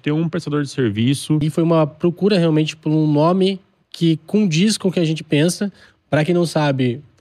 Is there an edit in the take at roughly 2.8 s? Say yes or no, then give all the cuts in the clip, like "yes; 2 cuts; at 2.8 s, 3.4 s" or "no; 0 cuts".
no; 1 cut; at 1.4 s